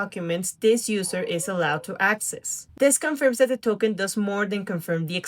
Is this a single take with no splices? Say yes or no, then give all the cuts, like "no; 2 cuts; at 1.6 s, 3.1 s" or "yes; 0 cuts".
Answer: no; 1 cut; at 2.6 s